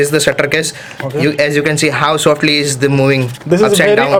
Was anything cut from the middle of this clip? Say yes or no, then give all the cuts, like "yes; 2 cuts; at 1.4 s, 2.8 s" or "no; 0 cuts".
no; 0 cuts